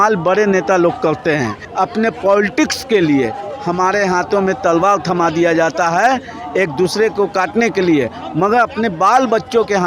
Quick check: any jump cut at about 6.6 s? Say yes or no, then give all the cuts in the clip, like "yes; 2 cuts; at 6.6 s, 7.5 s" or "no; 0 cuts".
no; 1 cut; at 1.6 s